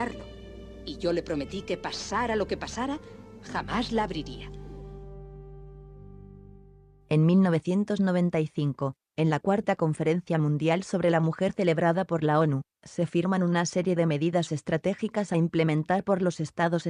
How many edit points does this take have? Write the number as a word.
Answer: zero